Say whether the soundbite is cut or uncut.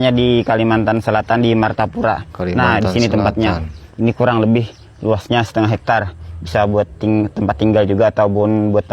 uncut